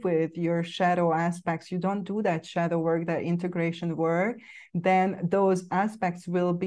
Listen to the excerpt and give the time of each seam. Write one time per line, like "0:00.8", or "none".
none